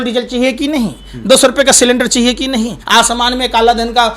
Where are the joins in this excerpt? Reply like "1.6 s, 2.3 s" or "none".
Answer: 2.8 s